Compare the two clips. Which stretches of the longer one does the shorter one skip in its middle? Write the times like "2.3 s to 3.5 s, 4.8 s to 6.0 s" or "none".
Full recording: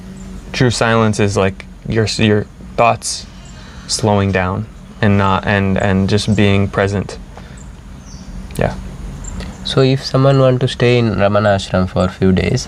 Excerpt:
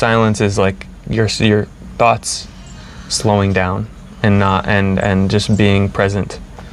none